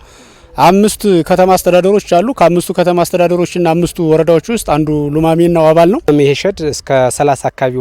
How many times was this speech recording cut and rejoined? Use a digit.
1